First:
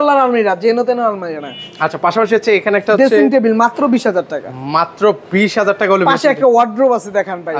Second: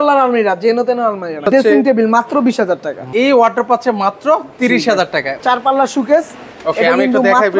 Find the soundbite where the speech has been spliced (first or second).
second